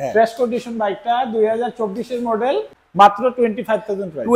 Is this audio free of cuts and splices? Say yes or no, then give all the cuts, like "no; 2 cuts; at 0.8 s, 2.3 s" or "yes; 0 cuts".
no; 1 cut; at 2.8 s